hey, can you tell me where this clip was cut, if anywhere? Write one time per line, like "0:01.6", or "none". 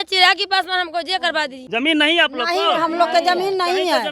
0:01.6